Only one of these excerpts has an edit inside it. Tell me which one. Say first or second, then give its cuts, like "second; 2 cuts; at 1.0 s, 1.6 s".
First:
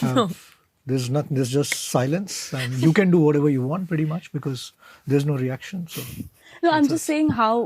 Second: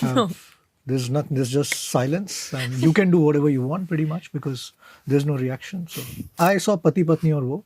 second; 1 cut; at 6.4 s